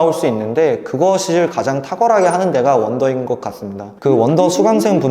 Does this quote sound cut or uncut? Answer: cut